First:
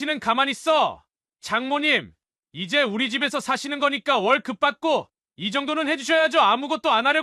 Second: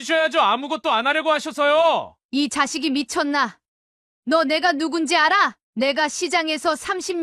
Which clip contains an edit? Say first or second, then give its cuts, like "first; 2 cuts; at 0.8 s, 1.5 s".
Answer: second; 2 cuts; at 2.1 s, 5.6 s